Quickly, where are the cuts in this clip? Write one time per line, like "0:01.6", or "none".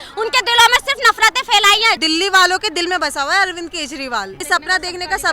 0:02.0
0:04.4